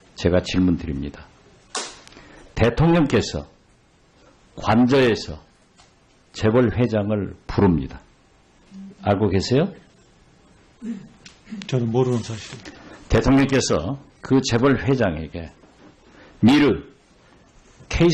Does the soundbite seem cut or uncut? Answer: uncut